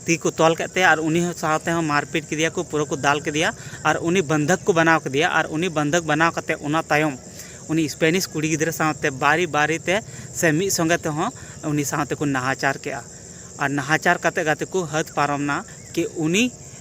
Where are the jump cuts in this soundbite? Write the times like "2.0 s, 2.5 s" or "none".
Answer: none

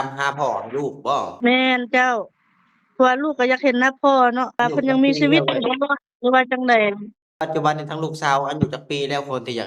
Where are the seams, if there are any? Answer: 1.5 s, 4.6 s, 7.3 s

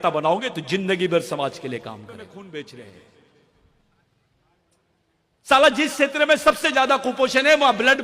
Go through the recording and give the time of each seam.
2.3 s

